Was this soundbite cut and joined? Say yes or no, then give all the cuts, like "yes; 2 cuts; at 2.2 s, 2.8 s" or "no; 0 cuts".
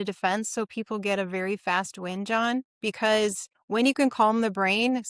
yes; 1 cut; at 3.5 s